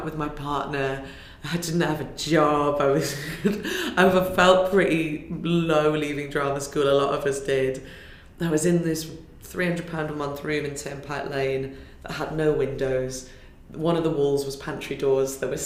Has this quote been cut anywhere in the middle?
no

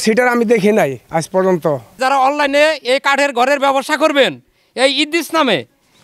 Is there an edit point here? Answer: yes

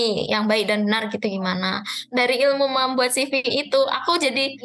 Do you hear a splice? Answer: no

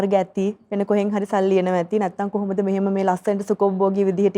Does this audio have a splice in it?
no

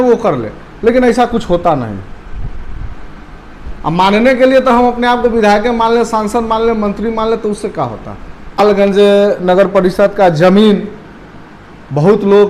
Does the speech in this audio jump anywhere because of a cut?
yes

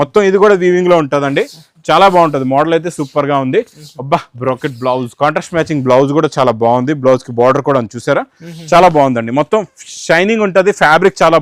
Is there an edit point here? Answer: no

